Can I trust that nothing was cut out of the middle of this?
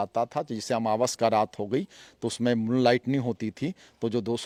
yes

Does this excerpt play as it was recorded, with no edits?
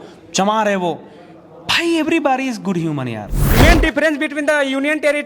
no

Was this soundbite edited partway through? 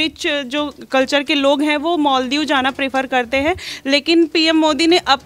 no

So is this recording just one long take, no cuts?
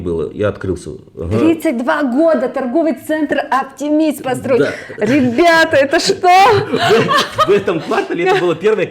yes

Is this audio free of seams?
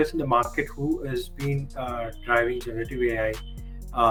yes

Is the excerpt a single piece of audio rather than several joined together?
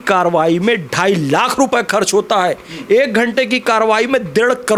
yes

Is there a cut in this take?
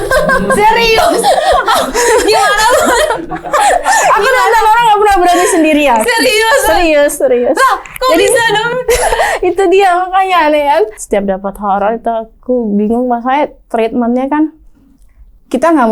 yes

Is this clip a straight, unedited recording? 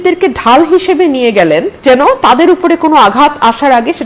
no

